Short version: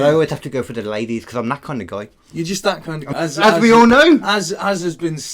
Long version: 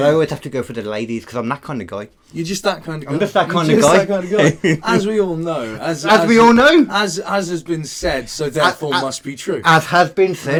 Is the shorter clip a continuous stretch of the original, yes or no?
no